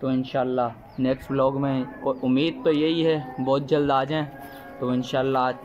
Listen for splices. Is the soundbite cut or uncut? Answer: uncut